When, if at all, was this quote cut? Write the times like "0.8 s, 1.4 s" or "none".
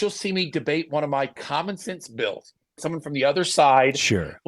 2.8 s